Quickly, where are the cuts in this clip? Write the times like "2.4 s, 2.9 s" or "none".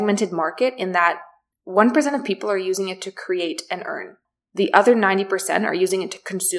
none